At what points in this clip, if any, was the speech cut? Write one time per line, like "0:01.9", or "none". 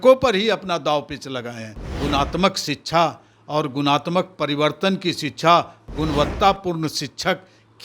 0:01.8